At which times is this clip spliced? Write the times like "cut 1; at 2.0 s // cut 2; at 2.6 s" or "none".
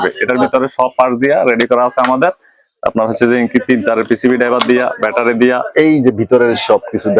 none